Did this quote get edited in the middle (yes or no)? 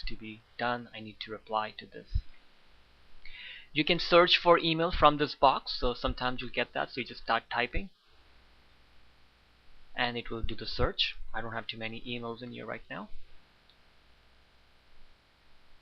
no